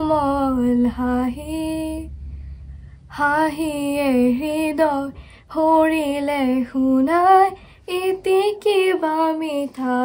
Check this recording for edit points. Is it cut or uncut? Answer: uncut